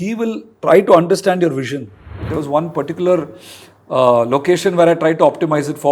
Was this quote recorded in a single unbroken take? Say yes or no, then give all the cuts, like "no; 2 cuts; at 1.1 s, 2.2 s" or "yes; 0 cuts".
no; 1 cut; at 2.2 s